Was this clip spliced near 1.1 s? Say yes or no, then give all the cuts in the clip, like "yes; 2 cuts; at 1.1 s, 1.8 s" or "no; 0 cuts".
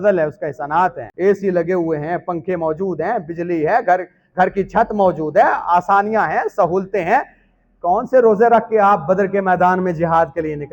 yes; 1 cut; at 1.1 s